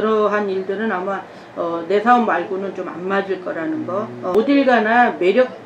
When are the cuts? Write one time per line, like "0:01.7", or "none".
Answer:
0:04.1